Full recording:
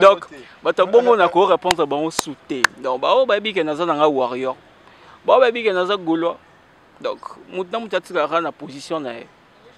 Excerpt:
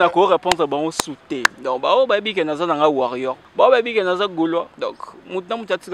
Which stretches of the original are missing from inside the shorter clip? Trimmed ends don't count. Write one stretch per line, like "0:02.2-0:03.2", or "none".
0:04.6-0:05.1
0:06.4-0:06.9